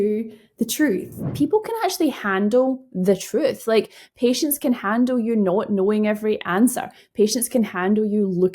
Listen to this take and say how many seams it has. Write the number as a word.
one